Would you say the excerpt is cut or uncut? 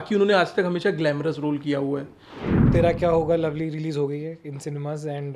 cut